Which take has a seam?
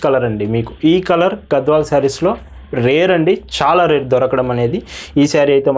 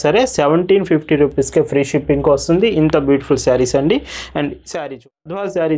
second; 1 cut; at 4.8 s

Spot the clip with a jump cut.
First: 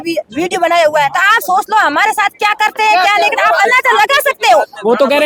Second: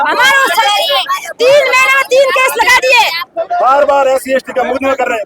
second; 1 cut; at 3.3 s

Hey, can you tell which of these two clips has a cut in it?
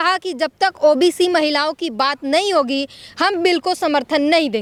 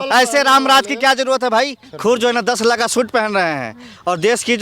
second; 1 cut; at 1.8 s

